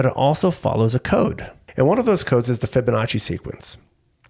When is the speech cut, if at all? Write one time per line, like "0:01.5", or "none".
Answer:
0:01.6